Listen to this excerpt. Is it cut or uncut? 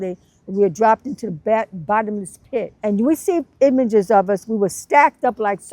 cut